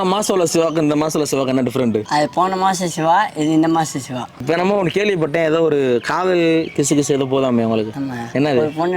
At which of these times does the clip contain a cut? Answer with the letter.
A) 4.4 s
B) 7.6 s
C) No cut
A